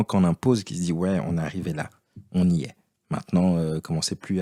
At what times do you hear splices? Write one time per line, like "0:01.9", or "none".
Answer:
none